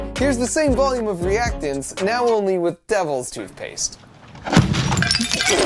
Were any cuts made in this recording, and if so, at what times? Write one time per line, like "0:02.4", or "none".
none